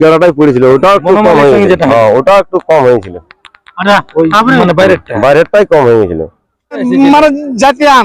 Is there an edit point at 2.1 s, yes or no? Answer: no